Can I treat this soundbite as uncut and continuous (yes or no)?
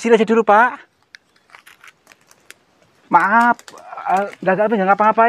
yes